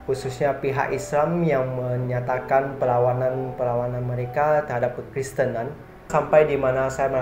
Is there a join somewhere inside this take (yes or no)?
yes